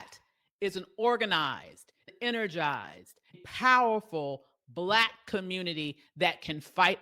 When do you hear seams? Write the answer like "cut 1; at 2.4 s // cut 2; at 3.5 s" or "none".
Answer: cut 1; at 2.0 s // cut 2; at 3.4 s